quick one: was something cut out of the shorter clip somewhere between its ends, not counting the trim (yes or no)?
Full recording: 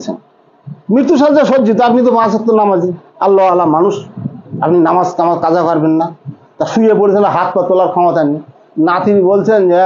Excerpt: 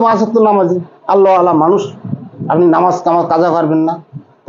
no